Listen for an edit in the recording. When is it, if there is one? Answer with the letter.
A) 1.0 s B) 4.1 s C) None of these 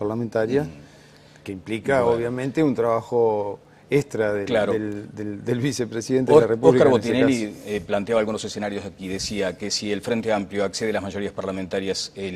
C